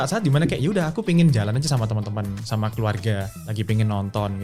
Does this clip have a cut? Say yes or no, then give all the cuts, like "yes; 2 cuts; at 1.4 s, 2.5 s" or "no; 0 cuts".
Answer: yes; 1 cut; at 3.4 s